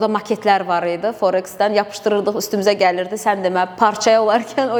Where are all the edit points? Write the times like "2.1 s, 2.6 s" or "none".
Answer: none